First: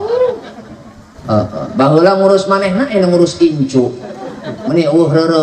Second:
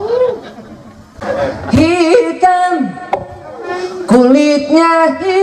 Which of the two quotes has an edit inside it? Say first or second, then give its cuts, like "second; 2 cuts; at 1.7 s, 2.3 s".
second; 1 cut; at 1.2 s